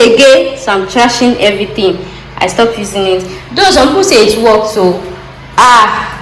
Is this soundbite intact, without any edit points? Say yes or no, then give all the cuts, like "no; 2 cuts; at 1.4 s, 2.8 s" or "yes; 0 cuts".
yes; 0 cuts